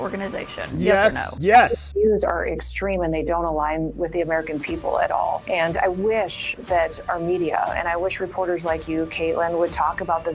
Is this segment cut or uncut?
uncut